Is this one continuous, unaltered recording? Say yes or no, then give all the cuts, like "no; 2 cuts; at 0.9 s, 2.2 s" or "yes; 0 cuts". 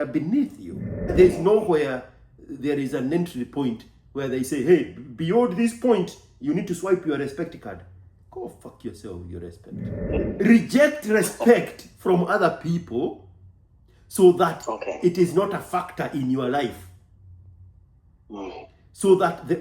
no; 2 cuts; at 1.1 s, 10.1 s